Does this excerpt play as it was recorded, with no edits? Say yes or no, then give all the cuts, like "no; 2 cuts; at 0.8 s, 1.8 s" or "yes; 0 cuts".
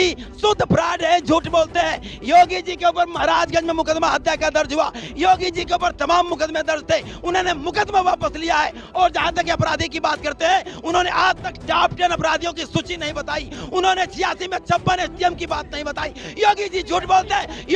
yes; 0 cuts